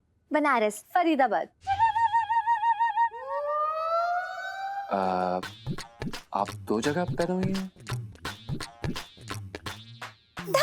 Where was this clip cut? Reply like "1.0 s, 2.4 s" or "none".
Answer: 4.8 s